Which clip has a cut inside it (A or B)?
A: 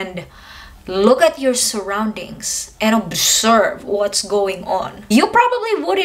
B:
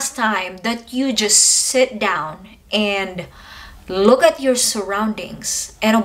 A